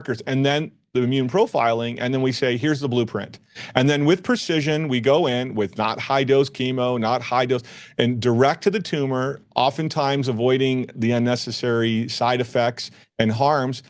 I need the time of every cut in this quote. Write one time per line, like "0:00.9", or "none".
none